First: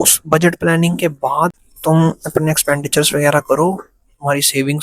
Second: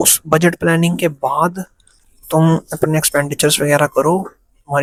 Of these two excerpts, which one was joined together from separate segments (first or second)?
first